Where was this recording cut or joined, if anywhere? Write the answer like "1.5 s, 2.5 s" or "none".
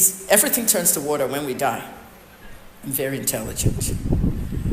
3.6 s